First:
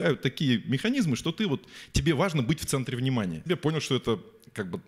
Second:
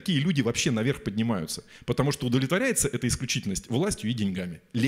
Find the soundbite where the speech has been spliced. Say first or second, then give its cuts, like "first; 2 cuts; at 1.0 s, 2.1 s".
first; 1 cut; at 3.4 s